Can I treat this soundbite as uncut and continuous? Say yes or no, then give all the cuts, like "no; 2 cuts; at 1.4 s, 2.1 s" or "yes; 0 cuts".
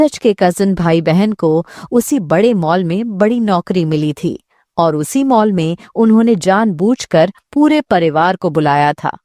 yes; 0 cuts